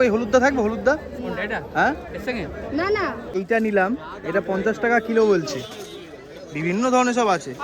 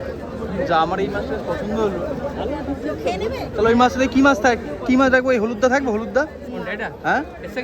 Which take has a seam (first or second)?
first